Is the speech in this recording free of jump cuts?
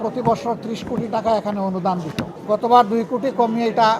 no; 1 cut; at 2.4 s

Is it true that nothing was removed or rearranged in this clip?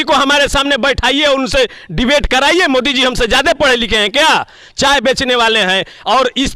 yes; 0 cuts

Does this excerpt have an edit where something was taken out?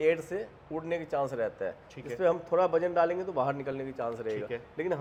no; 0 cuts

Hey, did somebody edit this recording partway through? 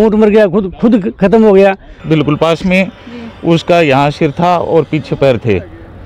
yes; 1 cut; at 2.0 s

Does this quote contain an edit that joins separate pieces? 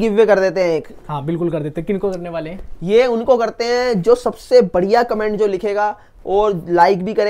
no; 0 cuts

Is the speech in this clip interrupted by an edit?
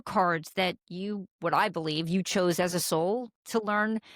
no; 0 cuts

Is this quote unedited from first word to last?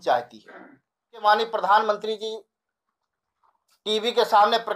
no; 1 cut; at 1.2 s

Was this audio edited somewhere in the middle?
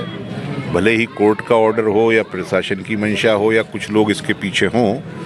no; 0 cuts

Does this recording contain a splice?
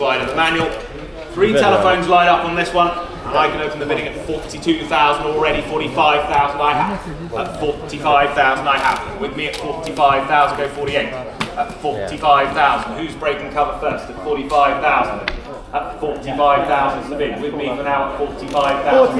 no; 0 cuts

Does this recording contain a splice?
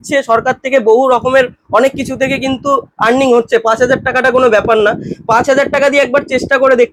no; 0 cuts

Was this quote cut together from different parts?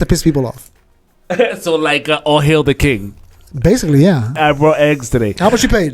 yes; 1 cut; at 4.3 s

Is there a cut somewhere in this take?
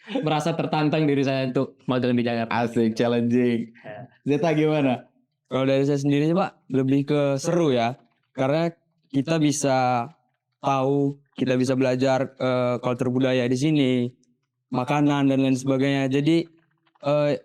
no; 0 cuts

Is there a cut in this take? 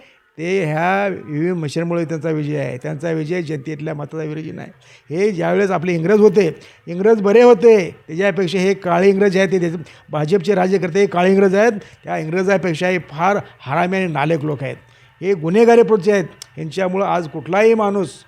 no; 0 cuts

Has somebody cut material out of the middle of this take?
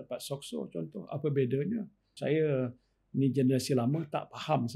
yes; 1 cut; at 2.1 s

